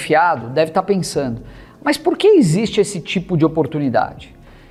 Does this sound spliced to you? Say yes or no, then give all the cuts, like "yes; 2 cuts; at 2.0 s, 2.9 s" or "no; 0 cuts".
no; 0 cuts